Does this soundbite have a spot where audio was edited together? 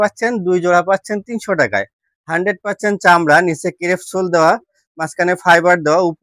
no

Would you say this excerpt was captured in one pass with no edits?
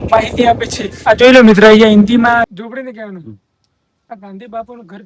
no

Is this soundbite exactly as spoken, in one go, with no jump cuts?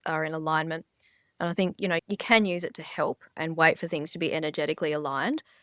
no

